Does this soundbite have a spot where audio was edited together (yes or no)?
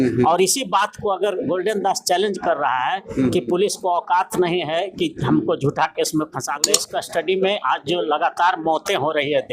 yes